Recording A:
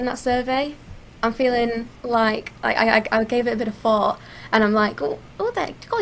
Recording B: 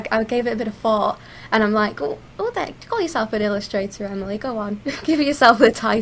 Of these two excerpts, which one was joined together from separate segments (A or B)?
A